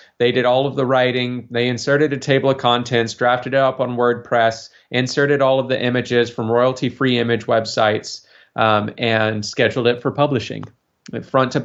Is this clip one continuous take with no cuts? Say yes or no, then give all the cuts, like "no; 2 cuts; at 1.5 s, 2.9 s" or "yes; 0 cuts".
yes; 0 cuts